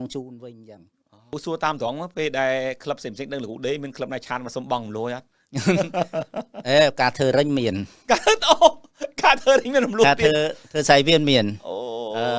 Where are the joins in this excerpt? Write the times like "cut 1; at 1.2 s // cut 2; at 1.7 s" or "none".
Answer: cut 1; at 1.3 s